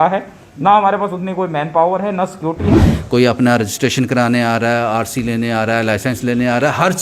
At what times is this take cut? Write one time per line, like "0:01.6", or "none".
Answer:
0:02.7